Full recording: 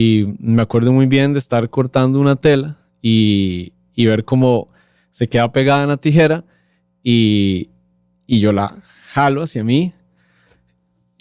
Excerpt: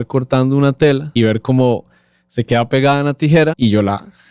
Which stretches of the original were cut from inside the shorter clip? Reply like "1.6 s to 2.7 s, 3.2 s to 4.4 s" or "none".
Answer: 2.7 s to 3.9 s, 6.4 s to 8.3 s